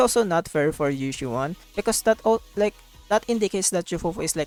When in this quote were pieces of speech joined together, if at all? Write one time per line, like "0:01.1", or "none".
none